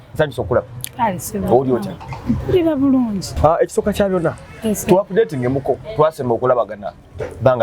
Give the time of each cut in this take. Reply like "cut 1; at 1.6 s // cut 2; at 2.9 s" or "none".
cut 1; at 3.3 s